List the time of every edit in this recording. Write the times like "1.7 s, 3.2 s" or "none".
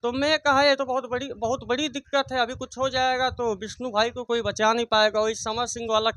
none